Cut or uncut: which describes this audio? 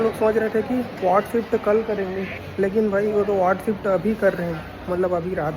uncut